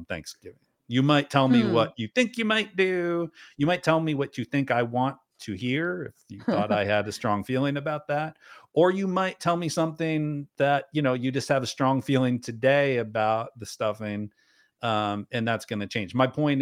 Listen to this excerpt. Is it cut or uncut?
uncut